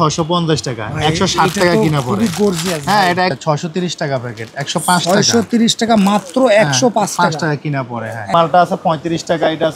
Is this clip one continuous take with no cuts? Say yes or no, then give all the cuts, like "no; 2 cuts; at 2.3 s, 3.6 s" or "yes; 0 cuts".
no; 2 cuts; at 3.4 s, 8.3 s